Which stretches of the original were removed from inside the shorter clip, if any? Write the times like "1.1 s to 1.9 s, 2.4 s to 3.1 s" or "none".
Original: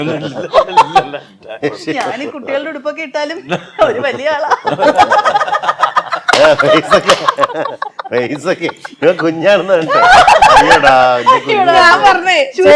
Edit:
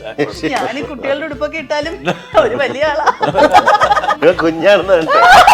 5.6 s to 8.9 s